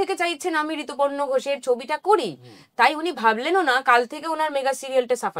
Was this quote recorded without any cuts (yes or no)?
yes